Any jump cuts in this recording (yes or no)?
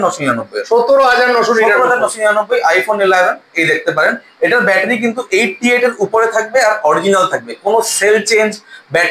no